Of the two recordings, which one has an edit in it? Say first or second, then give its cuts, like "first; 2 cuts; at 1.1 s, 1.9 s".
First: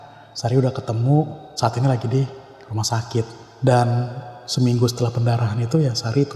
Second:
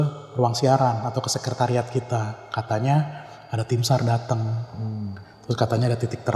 first; 2 cuts; at 1.5 s, 3.4 s